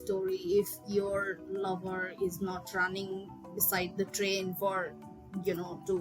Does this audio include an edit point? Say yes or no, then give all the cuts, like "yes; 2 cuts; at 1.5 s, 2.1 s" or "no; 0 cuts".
no; 0 cuts